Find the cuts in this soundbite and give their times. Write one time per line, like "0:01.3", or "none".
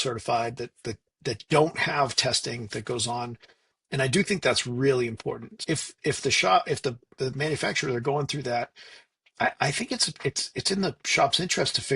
0:05.5